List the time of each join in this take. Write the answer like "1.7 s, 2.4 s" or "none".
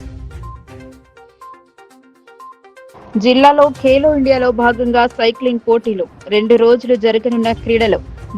1.6 s, 2.9 s